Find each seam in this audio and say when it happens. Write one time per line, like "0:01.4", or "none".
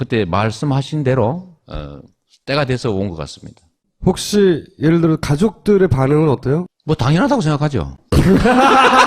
0:06.7

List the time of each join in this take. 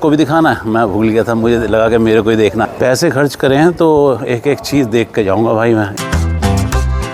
0:02.7
0:05.9

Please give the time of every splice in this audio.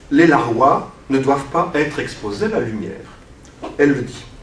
0:03.5

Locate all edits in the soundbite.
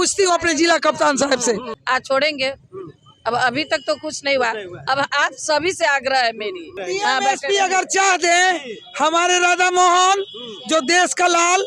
0:01.7
0:06.8

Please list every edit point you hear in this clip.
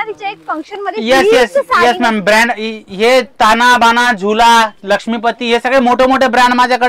none

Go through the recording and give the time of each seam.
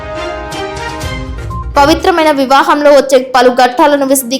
none

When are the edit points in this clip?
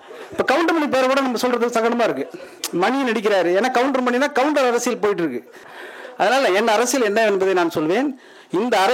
0:05.7

